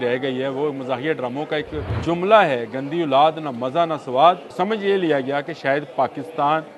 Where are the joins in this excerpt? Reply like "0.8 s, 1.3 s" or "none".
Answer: 1.8 s, 4.5 s

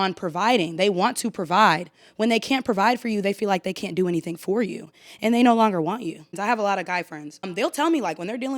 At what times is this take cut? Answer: 6.3 s, 7.5 s

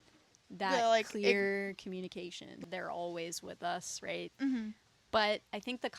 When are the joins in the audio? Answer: 2.6 s

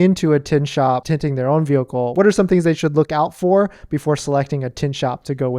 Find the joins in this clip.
1.0 s, 2.1 s

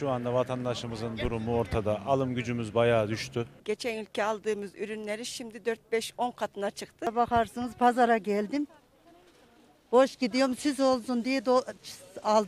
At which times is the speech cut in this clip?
3.6 s, 7.1 s

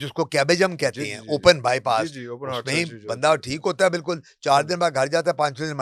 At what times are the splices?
none

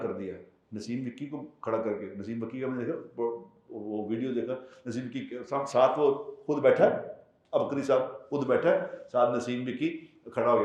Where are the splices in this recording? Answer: none

